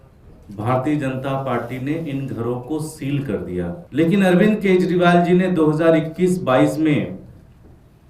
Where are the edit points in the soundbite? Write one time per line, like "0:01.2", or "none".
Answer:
0:03.8